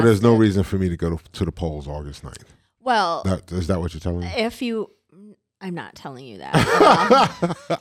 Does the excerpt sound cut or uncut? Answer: uncut